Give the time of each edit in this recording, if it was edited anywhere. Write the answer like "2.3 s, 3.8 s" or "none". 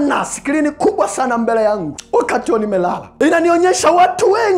1.9 s, 3.1 s